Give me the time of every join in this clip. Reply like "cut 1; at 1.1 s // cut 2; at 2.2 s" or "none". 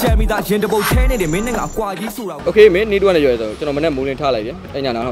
cut 1; at 2.3 s